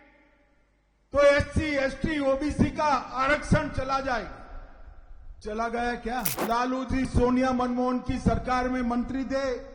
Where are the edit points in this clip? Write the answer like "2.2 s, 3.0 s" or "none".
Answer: 6.3 s

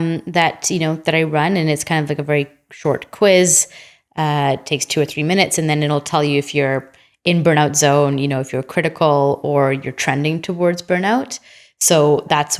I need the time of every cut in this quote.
none

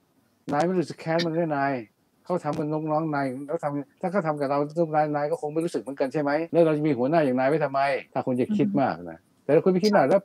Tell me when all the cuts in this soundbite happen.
6.5 s, 8.1 s

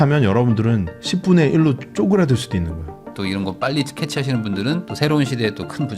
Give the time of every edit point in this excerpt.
3.1 s

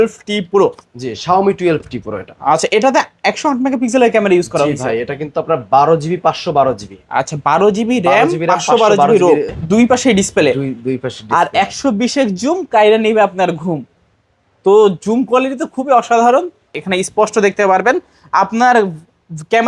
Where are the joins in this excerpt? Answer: 9.5 s, 16.7 s

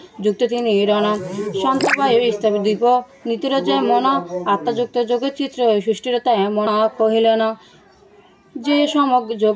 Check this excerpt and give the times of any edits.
6.7 s

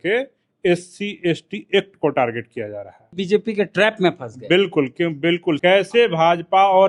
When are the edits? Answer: 3.1 s, 5.6 s

